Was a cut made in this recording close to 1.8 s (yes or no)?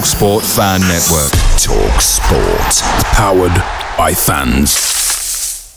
no